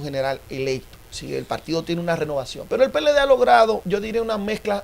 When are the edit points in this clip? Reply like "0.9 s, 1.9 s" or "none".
2.6 s, 3.8 s